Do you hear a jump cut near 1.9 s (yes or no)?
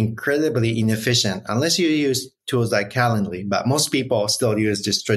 no